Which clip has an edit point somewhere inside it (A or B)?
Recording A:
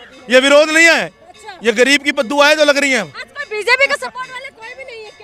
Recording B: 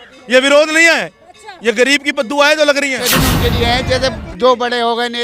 B